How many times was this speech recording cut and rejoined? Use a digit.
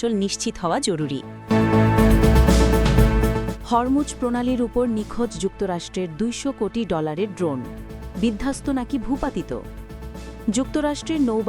2